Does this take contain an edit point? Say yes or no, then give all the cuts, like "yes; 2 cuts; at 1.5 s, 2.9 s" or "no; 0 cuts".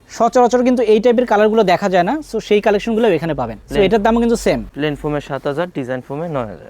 no; 0 cuts